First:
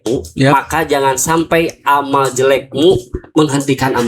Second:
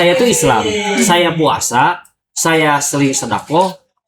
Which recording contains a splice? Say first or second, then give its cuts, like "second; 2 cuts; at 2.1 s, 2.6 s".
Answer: first; 1 cut; at 3.2 s